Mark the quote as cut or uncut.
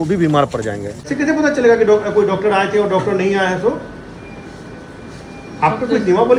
cut